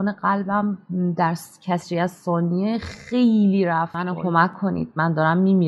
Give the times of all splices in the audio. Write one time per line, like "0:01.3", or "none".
0:04.0